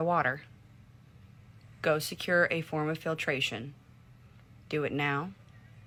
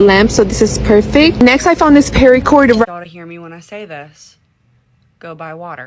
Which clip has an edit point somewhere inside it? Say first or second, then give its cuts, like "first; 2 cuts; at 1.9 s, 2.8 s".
second; 1 cut; at 2.9 s